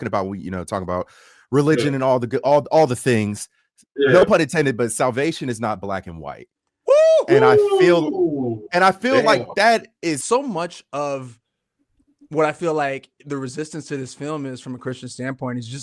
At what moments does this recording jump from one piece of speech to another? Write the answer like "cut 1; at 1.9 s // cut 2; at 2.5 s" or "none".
cut 1; at 10.2 s